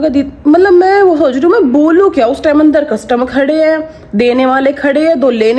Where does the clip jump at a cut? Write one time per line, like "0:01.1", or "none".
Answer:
none